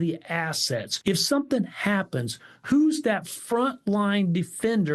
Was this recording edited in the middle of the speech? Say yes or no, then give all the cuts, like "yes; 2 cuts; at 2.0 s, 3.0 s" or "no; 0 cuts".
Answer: yes; 1 cut; at 0.9 s